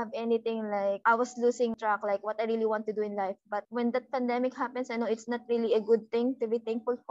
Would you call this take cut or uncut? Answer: cut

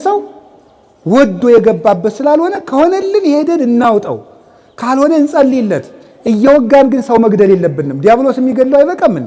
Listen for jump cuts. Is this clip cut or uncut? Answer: uncut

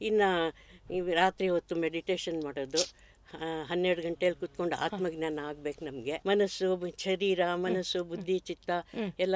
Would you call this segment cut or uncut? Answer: cut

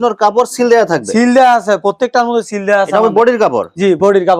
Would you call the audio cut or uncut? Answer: uncut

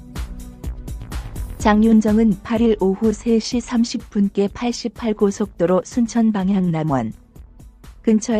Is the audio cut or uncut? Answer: cut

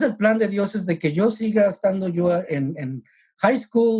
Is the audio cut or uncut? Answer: uncut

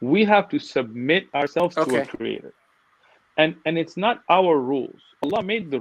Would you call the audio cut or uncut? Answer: uncut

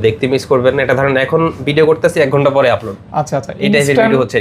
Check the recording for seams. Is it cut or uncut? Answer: uncut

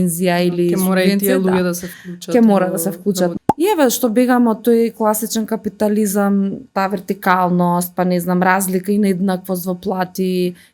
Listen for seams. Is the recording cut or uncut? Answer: cut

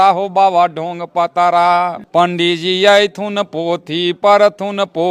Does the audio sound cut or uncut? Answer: uncut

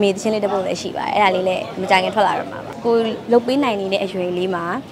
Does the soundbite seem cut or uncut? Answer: cut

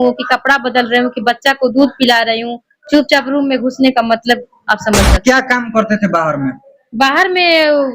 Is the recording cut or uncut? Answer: cut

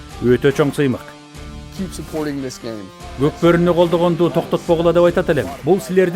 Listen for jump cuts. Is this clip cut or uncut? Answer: cut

